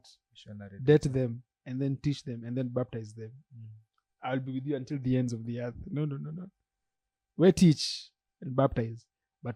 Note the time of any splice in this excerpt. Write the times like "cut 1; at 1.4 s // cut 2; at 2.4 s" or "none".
none

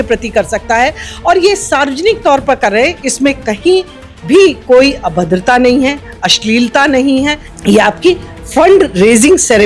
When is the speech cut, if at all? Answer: cut 1; at 7.5 s

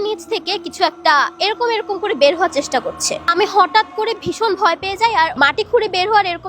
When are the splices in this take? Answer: cut 1; at 5.4 s

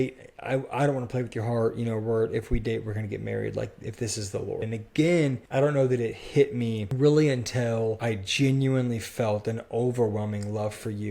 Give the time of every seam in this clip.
cut 1; at 4.7 s // cut 2; at 5.4 s // cut 3; at 6.8 s // cut 4; at 8.0 s

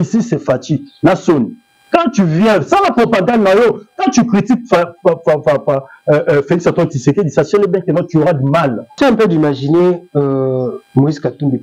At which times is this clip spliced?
cut 1; at 9.0 s

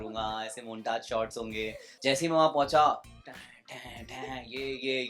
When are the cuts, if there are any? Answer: cut 1; at 1.8 s

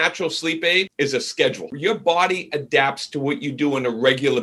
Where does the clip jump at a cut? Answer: cut 1; at 0.9 s // cut 2; at 1.7 s

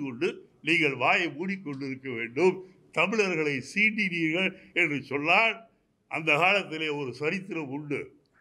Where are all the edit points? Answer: none

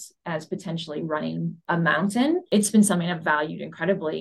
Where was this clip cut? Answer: cut 1; at 1.6 s // cut 2; at 2.4 s

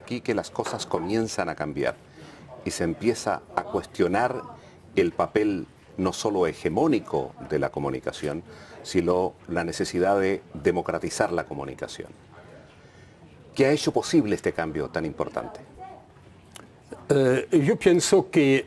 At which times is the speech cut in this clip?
cut 1; at 13.0 s

